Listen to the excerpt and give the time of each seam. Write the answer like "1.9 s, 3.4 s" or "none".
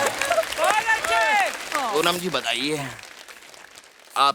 1.6 s